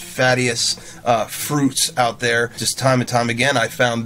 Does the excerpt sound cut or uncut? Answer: cut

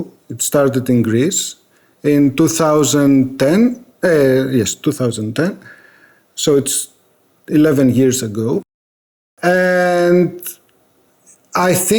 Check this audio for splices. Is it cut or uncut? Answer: uncut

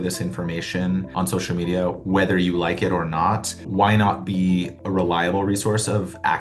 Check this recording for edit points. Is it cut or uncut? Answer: cut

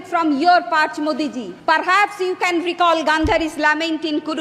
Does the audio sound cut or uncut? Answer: cut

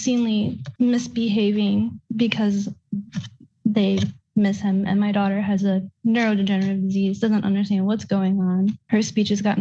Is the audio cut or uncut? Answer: uncut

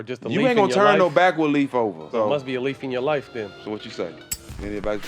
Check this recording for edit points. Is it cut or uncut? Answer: cut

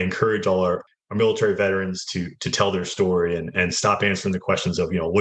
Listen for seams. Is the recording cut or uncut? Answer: cut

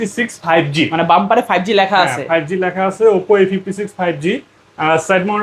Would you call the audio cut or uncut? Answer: uncut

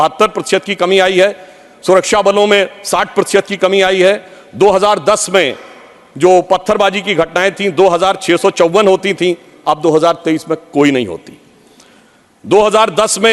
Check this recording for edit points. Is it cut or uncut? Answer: uncut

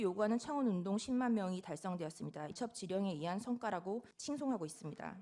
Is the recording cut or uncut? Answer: cut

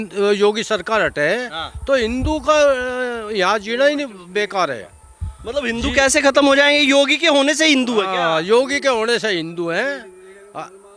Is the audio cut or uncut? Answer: uncut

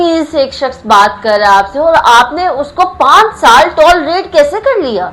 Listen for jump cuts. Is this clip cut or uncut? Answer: uncut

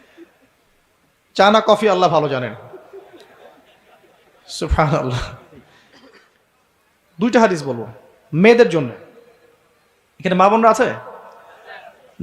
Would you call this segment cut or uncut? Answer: cut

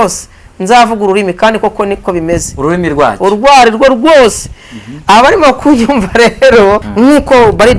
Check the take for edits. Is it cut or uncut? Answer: cut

